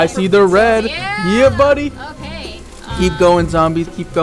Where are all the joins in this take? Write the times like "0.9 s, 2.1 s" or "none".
none